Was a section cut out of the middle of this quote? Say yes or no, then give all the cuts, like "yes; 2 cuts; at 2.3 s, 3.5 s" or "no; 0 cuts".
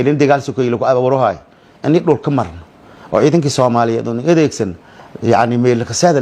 no; 0 cuts